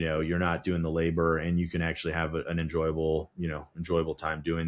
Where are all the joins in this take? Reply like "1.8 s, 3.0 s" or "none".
none